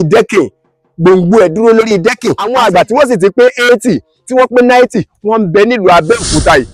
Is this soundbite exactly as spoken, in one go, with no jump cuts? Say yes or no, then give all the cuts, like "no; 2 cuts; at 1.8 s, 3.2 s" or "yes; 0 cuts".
no; 1 cut; at 2.5 s